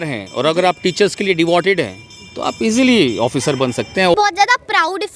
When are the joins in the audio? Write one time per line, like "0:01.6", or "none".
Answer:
0:04.1

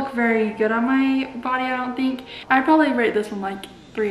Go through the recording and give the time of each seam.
0:02.3

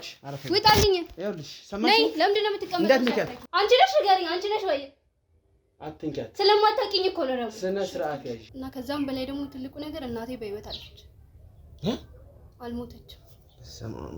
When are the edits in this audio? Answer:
0:03.4
0:08.4

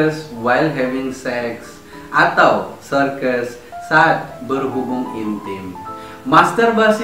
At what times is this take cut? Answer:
none

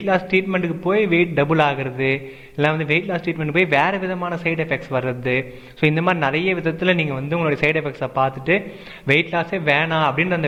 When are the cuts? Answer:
none

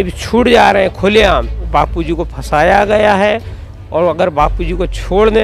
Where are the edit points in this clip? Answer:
0:01.6

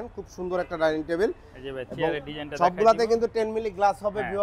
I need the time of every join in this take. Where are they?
none

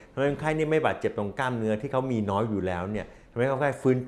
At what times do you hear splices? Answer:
none

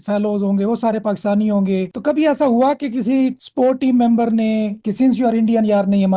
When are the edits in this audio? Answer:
0:01.9
0:04.8

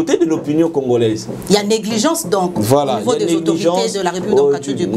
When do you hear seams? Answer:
none

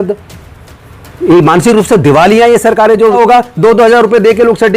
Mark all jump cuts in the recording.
0:03.2

